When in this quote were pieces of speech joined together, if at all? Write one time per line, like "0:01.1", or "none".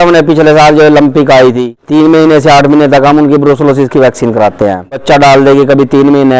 0:01.8
0:05.0